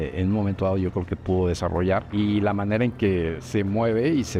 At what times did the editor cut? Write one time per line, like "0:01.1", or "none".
0:02.1